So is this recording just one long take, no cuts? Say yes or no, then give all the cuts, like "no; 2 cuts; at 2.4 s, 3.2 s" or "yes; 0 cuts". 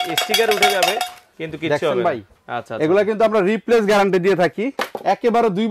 yes; 0 cuts